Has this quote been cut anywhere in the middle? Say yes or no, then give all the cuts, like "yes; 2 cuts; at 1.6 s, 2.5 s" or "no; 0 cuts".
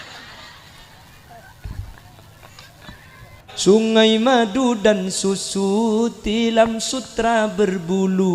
yes; 1 cut; at 3.5 s